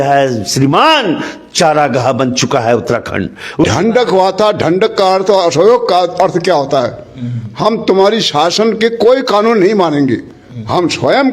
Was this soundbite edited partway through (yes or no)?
yes